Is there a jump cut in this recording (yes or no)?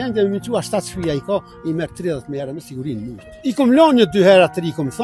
yes